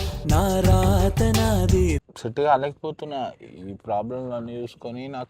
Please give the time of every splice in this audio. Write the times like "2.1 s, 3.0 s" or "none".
2.2 s